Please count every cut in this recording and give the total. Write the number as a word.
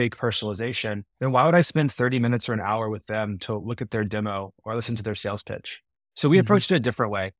one